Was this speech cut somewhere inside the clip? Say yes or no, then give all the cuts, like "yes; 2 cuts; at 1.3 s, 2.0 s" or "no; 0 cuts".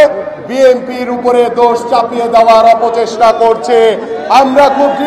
no; 0 cuts